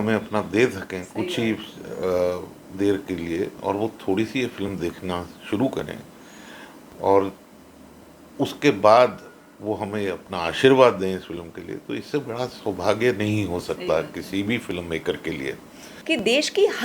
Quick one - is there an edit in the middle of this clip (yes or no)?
yes